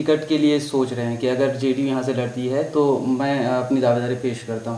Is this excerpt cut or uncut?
uncut